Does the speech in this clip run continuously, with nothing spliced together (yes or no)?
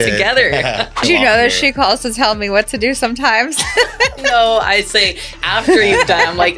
no